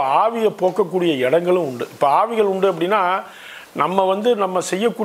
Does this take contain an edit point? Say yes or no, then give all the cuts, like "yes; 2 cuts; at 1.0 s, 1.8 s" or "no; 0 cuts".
no; 0 cuts